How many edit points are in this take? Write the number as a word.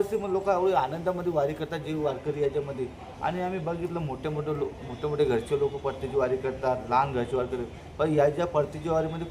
zero